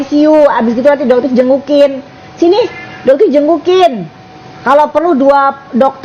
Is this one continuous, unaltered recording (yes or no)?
yes